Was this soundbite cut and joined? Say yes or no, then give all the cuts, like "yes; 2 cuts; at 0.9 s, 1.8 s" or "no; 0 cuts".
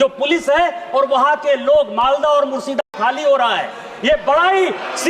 yes; 1 cut; at 2.8 s